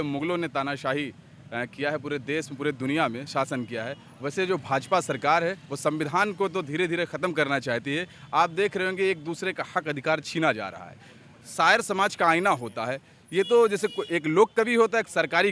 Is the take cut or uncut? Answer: uncut